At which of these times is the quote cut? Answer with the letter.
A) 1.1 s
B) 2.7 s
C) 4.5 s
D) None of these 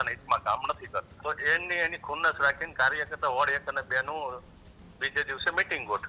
A